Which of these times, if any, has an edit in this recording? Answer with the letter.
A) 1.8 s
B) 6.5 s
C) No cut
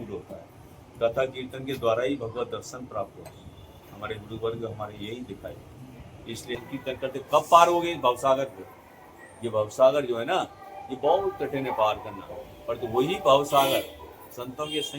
B